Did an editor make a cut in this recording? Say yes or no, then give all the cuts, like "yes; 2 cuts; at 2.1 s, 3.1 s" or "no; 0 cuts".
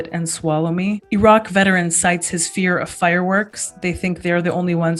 no; 0 cuts